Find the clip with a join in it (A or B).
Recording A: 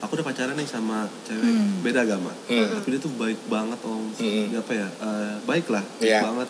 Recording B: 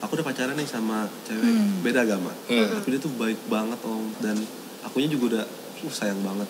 B